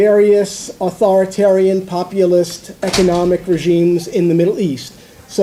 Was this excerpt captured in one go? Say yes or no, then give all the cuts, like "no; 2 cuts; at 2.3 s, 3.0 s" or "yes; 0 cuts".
yes; 0 cuts